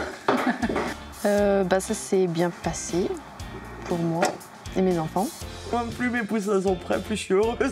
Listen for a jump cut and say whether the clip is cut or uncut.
cut